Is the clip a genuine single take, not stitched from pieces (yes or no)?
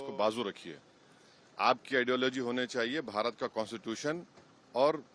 yes